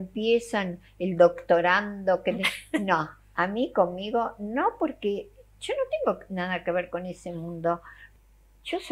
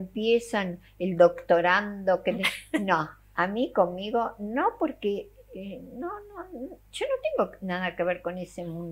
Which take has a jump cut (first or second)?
first